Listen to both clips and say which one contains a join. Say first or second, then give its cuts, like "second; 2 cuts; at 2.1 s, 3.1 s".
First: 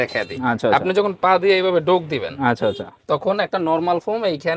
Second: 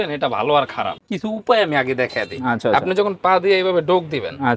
second; 1 cut; at 0.9 s